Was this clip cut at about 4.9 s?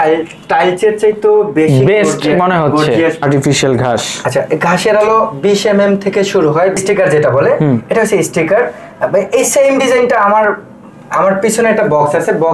no; 2 cuts; at 3.2 s, 6.8 s

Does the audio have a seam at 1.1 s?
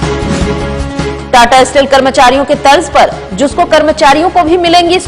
yes; 1 cut; at 1.1 s

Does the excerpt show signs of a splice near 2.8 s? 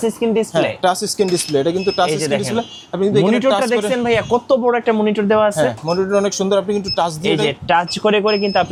no; 0 cuts

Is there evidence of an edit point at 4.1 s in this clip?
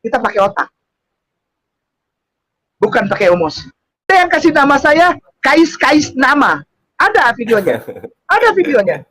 yes; 1 cut; at 4.1 s

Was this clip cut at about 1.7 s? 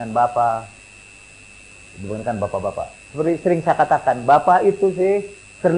no; 0 cuts

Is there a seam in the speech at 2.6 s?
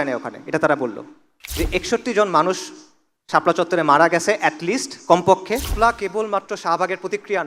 no; 2 cuts; at 1.4 s, 5.7 s

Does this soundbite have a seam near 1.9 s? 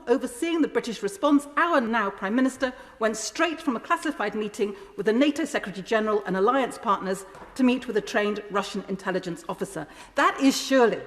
yes; 1 cut; at 1.9 s

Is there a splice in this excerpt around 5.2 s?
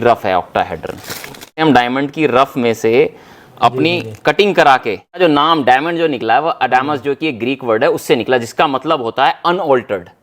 yes; 2 cuts; at 1.6 s, 5.2 s

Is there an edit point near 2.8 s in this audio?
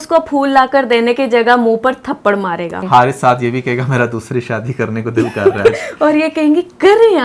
yes; 1 cut; at 2.8 s

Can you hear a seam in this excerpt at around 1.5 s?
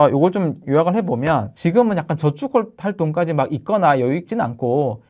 yes; 1 cut; at 1.5 s

